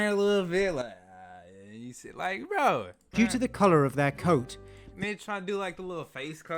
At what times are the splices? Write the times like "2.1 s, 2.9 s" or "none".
3.0 s